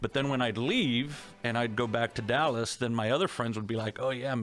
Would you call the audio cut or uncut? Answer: uncut